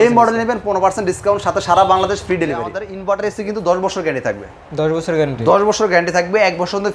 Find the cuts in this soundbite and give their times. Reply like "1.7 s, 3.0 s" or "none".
2.9 s